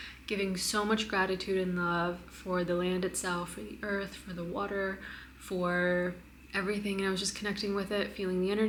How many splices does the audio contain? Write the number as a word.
zero